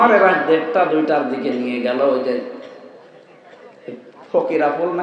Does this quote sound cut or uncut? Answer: uncut